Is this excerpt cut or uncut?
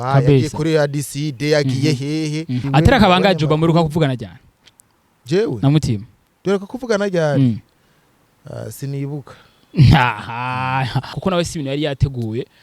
cut